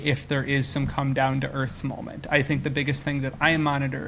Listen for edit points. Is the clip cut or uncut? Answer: uncut